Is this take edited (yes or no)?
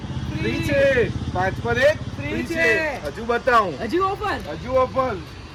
no